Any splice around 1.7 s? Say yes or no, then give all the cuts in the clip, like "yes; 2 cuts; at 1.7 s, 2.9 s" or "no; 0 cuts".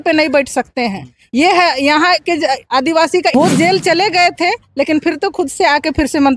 no; 1 cut; at 3.3 s